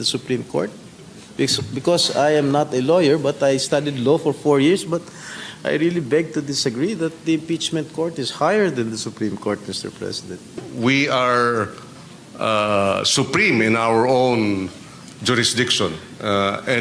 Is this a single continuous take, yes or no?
no